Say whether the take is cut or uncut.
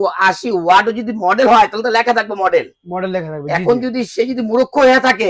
uncut